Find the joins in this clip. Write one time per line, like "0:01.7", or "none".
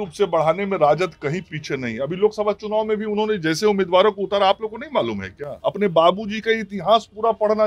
0:05.4